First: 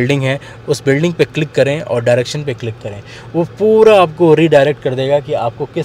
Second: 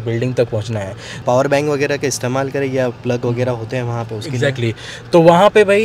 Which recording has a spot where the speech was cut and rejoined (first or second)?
second